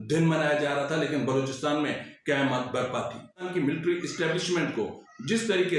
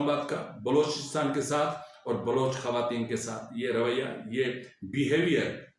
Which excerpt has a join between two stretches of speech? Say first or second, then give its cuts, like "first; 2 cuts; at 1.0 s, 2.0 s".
first; 1 cut; at 3.5 s